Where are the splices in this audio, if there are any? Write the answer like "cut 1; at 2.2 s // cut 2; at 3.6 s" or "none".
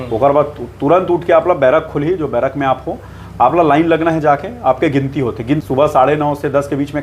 cut 1; at 5.6 s